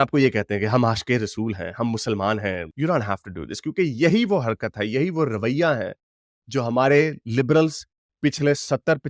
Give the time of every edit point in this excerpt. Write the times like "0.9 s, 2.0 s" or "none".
2.7 s